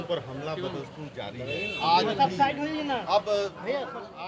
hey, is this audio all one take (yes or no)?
yes